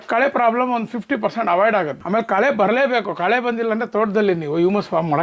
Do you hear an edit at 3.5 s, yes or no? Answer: no